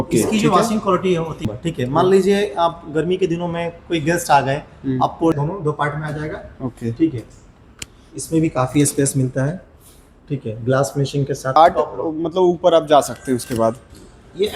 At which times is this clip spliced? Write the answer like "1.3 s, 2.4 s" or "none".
1.5 s, 5.3 s, 11.6 s